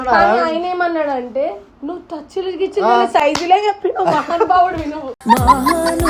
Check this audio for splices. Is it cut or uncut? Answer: uncut